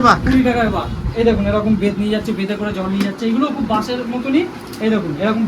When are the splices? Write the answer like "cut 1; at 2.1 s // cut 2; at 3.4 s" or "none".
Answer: cut 1; at 1.0 s